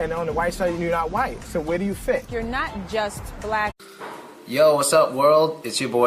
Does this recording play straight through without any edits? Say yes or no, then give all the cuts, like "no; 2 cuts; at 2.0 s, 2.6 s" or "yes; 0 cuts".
yes; 0 cuts